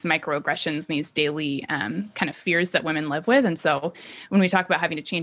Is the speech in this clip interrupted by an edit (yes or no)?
no